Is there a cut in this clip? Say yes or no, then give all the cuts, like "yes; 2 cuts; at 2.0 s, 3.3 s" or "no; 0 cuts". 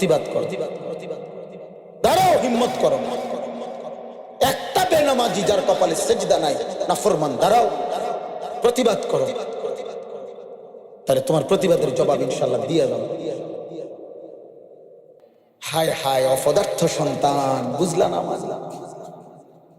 yes; 1 cut; at 15.2 s